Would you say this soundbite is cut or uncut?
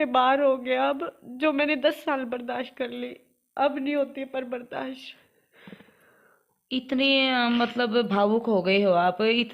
uncut